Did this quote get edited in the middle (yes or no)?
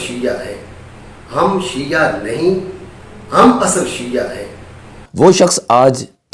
no